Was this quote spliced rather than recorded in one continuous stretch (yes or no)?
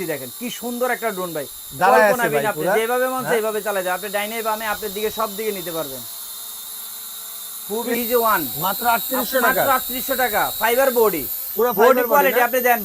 yes